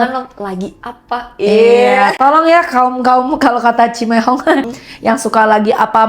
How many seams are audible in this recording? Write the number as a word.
one